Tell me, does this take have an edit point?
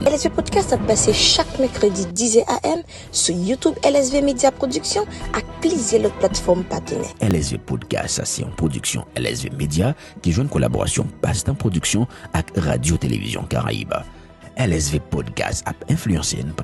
no; 0 cuts

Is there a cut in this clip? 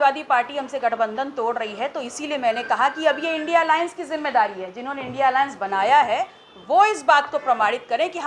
no; 0 cuts

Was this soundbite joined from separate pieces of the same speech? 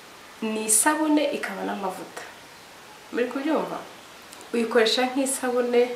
no; 0 cuts

